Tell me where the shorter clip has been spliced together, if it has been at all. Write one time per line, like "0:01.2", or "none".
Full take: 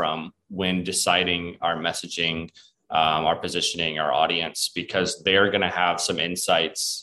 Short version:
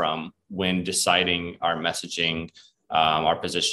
none